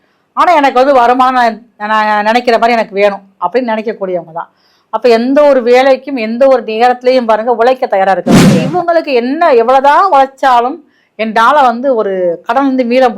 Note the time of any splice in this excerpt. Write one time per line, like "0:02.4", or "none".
0:08.7